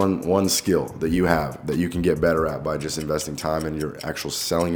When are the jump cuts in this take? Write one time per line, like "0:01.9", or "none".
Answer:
none